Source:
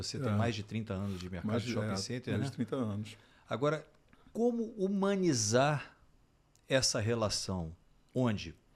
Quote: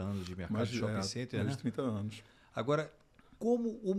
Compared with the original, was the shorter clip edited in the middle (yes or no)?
no